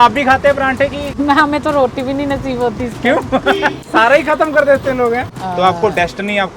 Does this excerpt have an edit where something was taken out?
yes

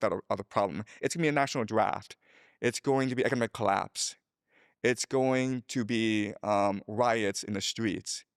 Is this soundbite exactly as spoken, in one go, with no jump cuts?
yes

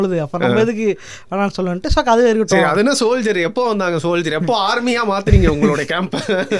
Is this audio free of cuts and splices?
yes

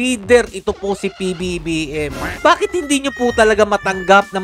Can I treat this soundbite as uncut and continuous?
no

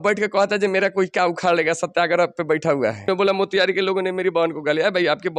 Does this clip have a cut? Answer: yes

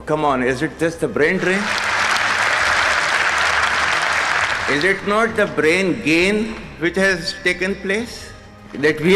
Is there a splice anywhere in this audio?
no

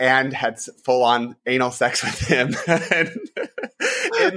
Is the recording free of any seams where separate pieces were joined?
yes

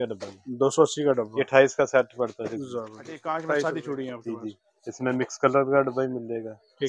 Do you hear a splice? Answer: yes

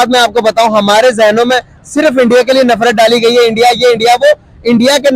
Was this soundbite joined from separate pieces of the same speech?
no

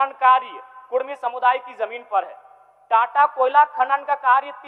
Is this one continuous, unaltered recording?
yes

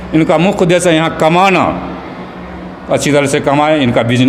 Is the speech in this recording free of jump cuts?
yes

